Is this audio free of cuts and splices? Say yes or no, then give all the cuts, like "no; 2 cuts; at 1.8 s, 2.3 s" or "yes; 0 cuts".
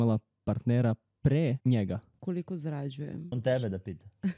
no; 2 cuts; at 2.1 s, 3.3 s